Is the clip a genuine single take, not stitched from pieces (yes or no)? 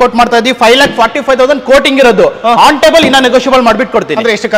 yes